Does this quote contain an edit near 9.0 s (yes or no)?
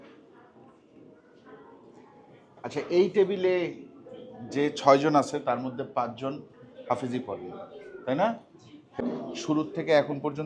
yes